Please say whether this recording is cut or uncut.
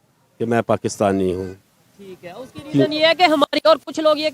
uncut